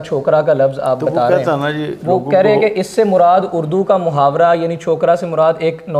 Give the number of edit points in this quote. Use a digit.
0